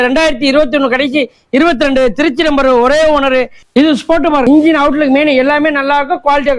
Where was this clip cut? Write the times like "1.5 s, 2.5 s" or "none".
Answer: 3.6 s, 4.4 s